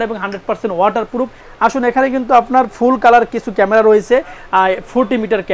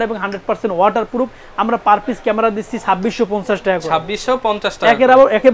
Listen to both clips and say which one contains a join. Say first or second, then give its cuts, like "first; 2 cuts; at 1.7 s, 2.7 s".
first; 1 cut; at 1.4 s